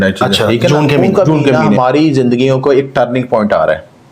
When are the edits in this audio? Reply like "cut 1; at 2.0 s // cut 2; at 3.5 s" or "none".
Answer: cut 1; at 1.8 s